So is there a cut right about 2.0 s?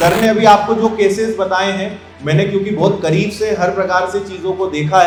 no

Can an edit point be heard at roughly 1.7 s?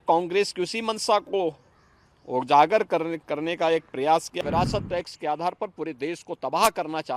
no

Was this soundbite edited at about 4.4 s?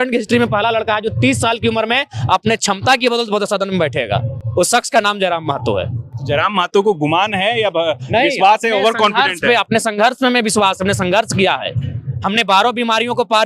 no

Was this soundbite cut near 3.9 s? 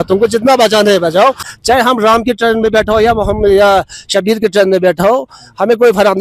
no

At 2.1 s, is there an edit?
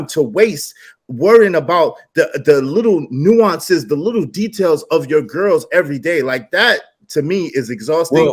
no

